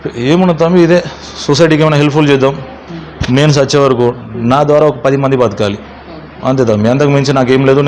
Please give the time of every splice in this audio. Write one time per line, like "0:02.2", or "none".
none

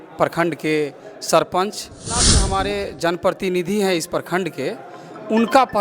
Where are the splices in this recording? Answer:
0:02.4

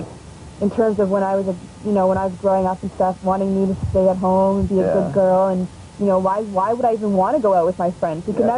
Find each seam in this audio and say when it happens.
0:07.2

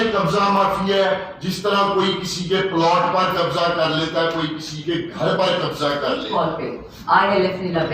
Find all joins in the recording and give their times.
0:06.2

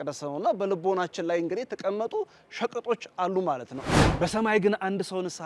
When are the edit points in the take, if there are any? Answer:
0:03.9

